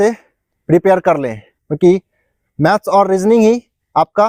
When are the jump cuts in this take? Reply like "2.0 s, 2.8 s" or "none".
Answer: none